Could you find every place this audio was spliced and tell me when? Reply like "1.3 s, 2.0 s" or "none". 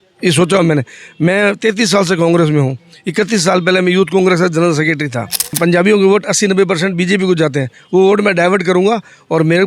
5.6 s

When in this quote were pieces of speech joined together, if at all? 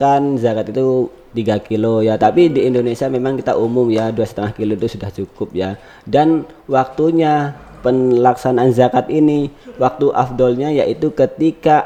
none

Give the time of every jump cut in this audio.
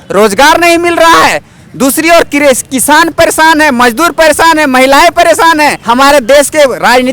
5.8 s

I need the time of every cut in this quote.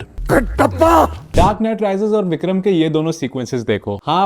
1.2 s

